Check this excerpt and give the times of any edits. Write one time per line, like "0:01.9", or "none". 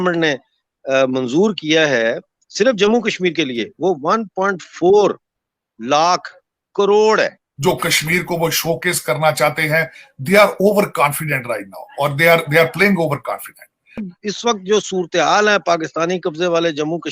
0:07.5
0:14.1